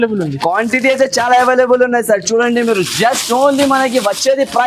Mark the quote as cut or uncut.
uncut